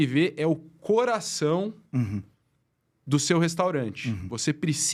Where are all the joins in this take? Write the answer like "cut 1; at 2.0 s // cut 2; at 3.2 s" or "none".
none